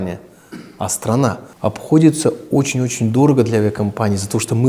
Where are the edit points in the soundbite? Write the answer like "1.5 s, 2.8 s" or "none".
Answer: 1.5 s